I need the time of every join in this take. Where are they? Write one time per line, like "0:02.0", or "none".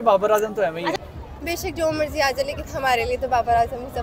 0:00.9

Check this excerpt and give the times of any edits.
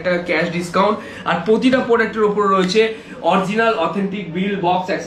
none

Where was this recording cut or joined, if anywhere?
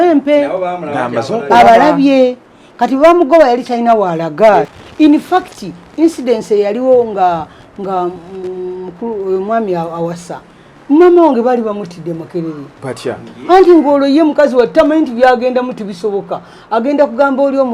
0:04.7

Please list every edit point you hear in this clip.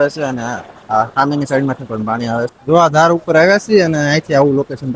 0:02.6

